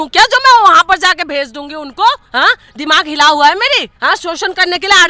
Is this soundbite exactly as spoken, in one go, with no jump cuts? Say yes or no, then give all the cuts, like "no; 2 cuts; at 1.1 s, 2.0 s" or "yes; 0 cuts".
no; 2 cuts; at 2.2 s, 3.9 s